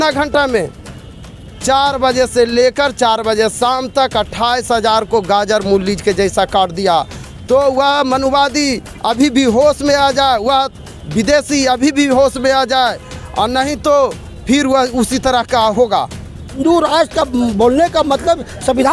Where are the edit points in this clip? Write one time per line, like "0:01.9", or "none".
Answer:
0:16.6